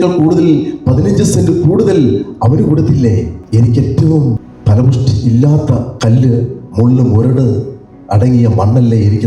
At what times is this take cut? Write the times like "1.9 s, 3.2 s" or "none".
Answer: 3.4 s, 4.5 s, 5.6 s